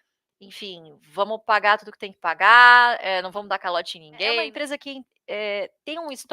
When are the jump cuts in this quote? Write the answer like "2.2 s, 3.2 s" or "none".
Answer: 4.4 s